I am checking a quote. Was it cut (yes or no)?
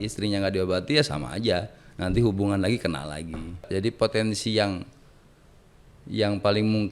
yes